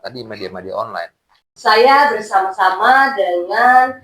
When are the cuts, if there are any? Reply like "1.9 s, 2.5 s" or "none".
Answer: 1.5 s